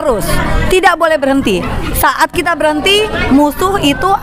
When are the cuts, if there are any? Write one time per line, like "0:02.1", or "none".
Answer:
none